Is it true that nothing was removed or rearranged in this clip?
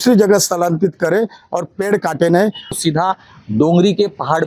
no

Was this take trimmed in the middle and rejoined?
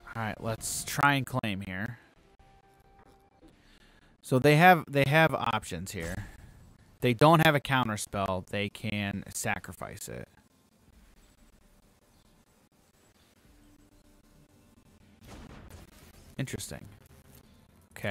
yes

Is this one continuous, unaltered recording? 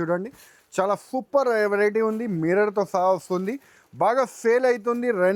yes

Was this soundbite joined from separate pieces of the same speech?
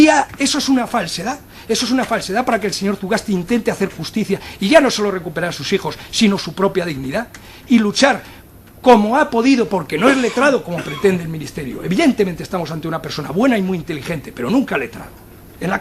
no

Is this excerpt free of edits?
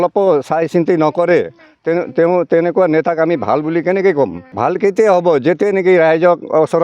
no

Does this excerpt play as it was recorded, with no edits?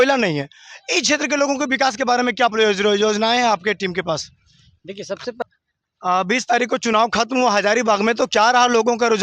no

